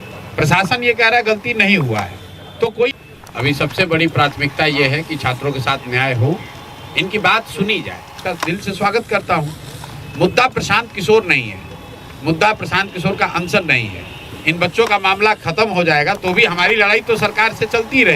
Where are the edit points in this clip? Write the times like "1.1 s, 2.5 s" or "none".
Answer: 3.0 s, 8.2 s